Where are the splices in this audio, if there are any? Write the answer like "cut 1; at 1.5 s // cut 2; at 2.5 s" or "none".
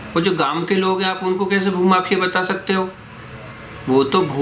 none